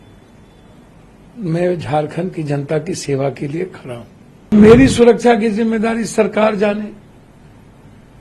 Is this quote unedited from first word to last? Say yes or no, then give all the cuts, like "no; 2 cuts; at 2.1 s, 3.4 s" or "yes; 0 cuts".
no; 1 cut; at 4.5 s